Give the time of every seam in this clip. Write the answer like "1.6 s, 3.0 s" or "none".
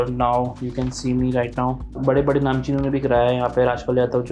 1.9 s